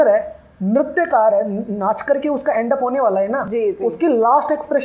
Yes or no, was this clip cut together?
no